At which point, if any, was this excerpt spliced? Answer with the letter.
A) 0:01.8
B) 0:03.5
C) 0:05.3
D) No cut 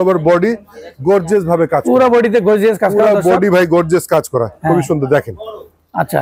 D